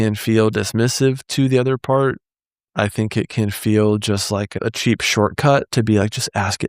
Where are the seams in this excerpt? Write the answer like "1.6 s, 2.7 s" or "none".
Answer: 4.6 s